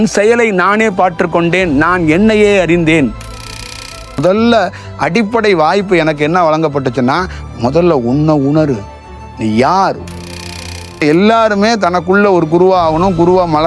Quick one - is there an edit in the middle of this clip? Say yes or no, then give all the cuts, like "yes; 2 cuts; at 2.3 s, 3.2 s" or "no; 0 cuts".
yes; 2 cuts; at 3.5 s, 10.5 s